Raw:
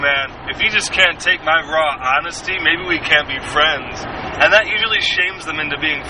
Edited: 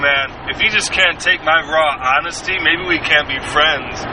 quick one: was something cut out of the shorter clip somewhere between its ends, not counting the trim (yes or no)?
no